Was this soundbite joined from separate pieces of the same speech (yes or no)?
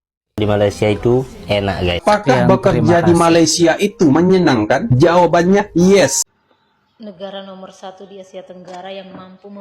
yes